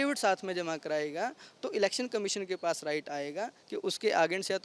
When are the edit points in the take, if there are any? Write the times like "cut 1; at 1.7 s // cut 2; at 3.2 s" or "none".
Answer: none